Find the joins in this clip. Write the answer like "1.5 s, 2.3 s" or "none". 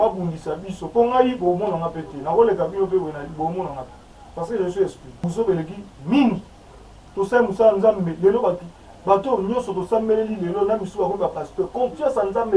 5.1 s